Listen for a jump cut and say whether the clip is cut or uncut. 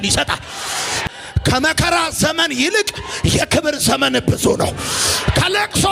cut